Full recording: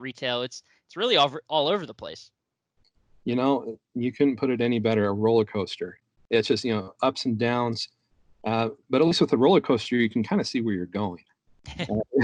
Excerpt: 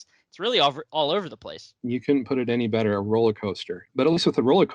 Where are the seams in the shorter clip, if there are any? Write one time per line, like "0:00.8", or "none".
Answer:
0:01.7
0:03.8